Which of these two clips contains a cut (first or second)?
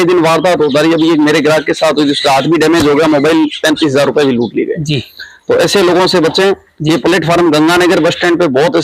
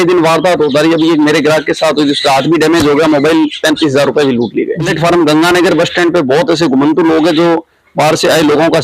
second